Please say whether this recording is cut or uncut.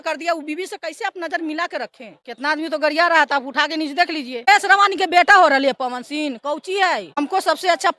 cut